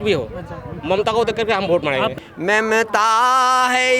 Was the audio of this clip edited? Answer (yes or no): yes